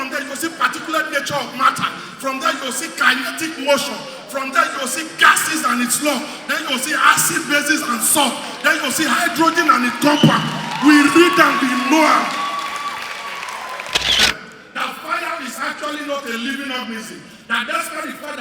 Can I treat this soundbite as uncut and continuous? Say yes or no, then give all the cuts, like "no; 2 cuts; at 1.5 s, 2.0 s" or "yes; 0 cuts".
no; 1 cut; at 14.2 s